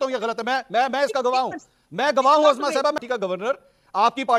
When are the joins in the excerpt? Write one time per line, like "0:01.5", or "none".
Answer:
0:03.0